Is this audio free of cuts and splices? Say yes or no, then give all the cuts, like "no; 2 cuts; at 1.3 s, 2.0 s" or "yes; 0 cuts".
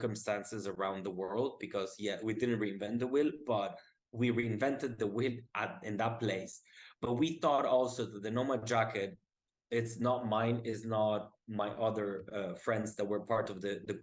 yes; 0 cuts